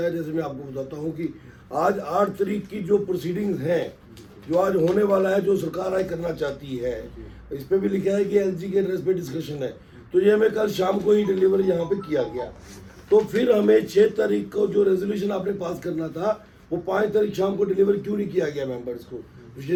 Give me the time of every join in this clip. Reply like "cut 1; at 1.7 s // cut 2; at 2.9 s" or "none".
none